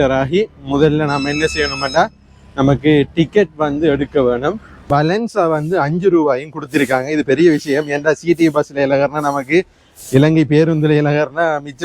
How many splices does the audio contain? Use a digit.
1